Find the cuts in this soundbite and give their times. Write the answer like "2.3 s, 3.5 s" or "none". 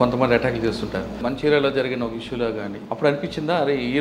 1.2 s, 2.8 s